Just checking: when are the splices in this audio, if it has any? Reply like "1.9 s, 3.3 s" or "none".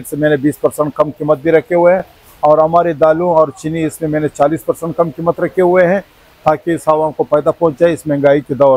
none